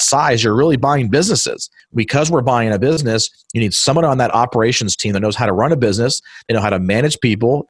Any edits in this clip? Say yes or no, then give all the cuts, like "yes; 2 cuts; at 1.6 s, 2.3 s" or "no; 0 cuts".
yes; 2 cuts; at 1.8 s, 3.0 s